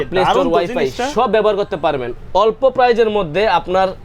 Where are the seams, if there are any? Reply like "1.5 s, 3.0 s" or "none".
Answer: none